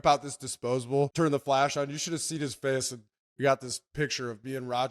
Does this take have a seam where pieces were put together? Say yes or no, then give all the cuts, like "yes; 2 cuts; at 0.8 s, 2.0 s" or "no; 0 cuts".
yes; 1 cut; at 1.1 s